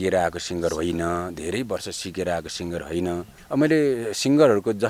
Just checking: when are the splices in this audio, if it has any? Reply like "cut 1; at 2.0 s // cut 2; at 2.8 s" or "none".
cut 1; at 3.3 s